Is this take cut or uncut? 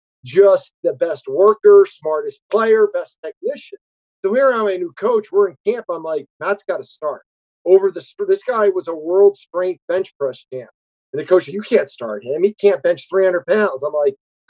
uncut